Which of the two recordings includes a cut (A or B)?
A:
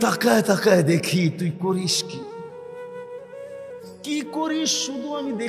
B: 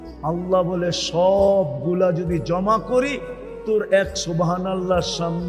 A